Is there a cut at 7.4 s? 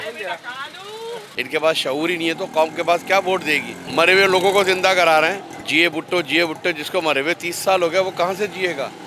no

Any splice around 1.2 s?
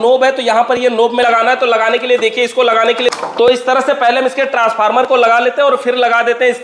yes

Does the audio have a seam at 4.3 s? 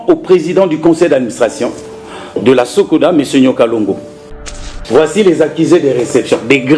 yes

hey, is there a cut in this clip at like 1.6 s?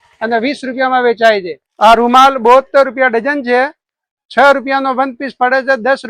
yes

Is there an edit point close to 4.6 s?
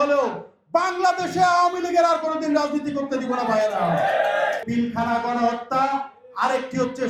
yes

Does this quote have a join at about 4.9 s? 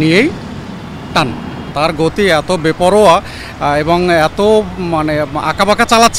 no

